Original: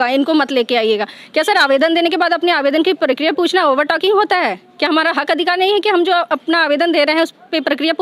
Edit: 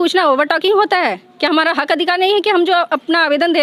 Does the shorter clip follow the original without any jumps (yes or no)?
yes